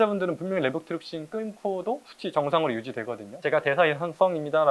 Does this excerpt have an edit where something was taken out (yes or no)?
yes